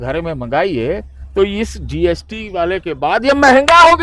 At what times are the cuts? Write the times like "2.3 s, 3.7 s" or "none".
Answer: none